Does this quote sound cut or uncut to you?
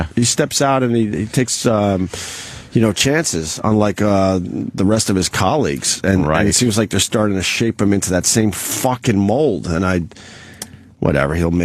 uncut